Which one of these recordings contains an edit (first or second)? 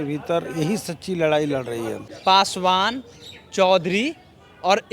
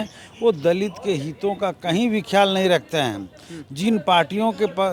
first